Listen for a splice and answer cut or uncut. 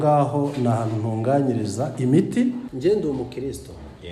cut